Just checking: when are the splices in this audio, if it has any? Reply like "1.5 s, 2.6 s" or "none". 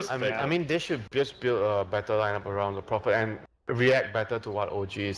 3.0 s